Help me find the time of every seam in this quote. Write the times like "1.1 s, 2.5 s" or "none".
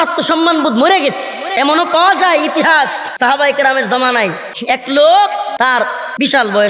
1.4 s, 3.0 s, 4.5 s, 5.6 s